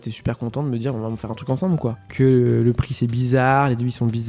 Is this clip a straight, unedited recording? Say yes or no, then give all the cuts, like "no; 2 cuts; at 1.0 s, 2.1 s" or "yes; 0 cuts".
no; 1 cut; at 2.0 s